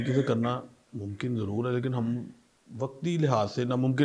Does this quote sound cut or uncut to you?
uncut